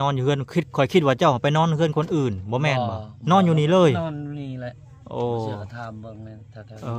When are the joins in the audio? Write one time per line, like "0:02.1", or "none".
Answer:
none